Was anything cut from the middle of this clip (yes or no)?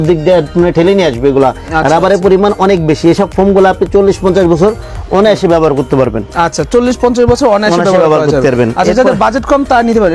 no